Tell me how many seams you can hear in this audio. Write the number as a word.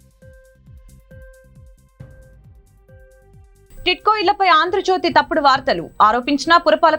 one